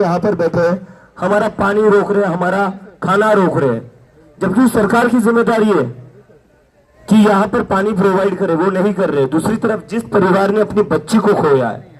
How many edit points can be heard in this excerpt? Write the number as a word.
zero